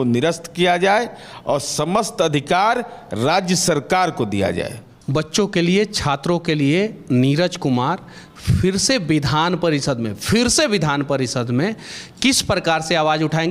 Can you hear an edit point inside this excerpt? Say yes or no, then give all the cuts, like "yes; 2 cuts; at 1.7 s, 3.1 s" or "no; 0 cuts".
yes; 1 cut; at 4.9 s